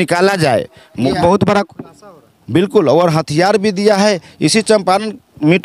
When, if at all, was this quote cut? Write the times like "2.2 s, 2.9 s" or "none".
1.1 s

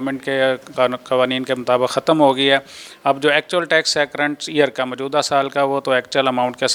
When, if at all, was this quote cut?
none

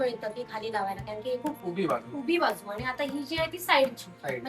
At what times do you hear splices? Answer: 1.6 s

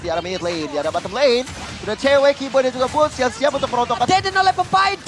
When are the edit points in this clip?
4.1 s

